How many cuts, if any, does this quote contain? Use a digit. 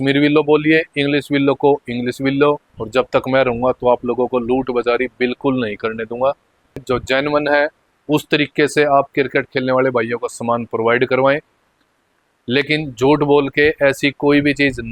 2